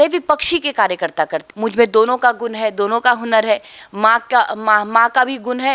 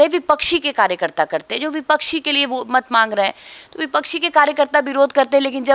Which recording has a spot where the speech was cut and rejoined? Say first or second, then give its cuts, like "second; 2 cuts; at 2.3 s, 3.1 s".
first; 1 cut; at 1.5 s